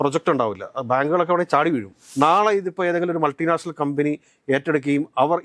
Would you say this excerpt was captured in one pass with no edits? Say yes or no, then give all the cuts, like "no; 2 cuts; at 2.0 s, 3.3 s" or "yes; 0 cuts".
no; 1 cut; at 2.0 s